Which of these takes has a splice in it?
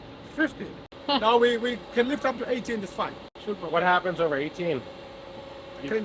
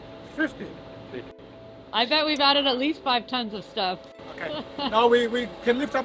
first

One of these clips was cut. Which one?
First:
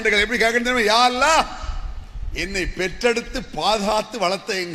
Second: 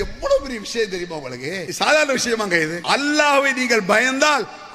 second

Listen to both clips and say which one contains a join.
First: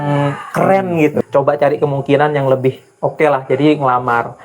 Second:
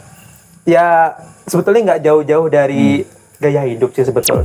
first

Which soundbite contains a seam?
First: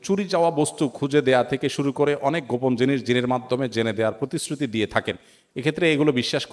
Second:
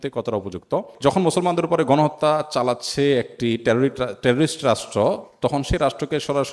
second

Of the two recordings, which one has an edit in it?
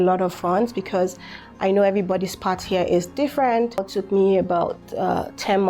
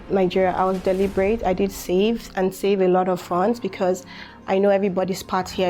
first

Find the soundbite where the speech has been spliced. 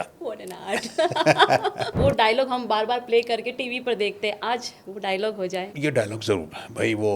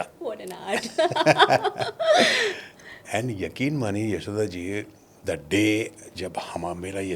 first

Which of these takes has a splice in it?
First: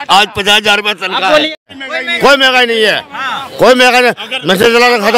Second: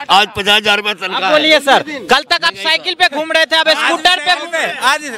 first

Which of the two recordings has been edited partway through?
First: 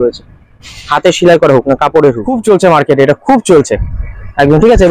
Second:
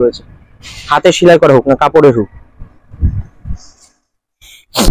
first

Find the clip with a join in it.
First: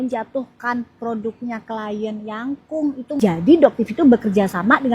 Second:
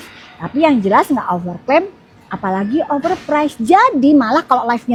first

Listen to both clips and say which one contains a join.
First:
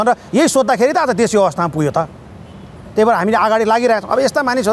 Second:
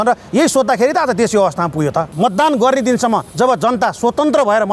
second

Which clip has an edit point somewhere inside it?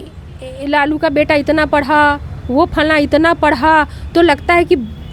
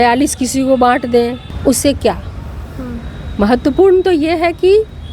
second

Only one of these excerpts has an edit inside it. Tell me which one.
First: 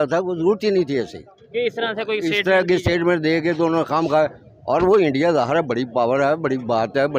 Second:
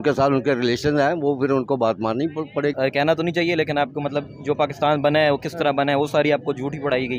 second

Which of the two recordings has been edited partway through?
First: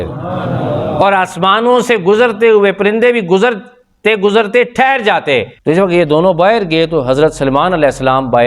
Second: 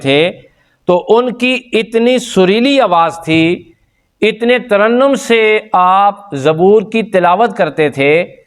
first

